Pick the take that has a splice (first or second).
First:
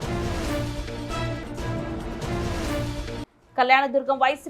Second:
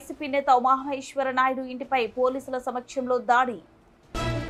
first